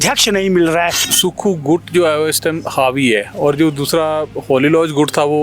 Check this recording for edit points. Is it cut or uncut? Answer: cut